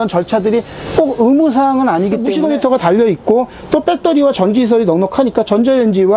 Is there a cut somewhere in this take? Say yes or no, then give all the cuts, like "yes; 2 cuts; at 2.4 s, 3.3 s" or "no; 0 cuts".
yes; 1 cut; at 2.3 s